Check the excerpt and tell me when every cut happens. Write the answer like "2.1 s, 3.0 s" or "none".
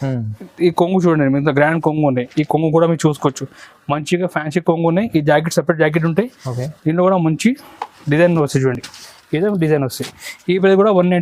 none